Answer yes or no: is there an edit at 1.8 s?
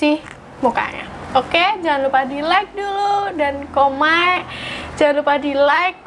no